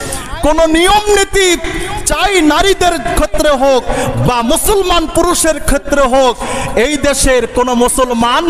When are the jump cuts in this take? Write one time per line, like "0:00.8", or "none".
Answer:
none